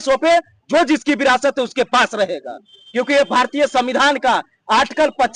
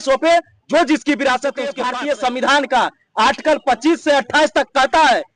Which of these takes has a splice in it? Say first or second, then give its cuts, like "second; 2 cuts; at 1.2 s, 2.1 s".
second; 1 cut; at 1.8 s